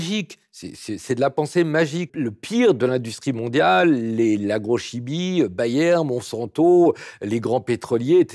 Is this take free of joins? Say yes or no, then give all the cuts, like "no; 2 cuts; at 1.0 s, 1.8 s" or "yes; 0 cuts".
no; 1 cut; at 2.1 s